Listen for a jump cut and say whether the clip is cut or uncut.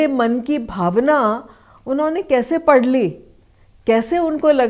uncut